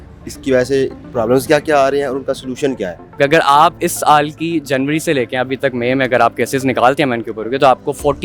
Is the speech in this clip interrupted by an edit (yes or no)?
yes